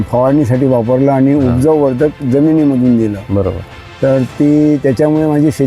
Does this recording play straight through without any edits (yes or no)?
yes